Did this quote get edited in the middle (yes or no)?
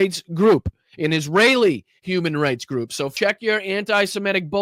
yes